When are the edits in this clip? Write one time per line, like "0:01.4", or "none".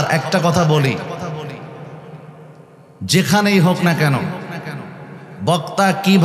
none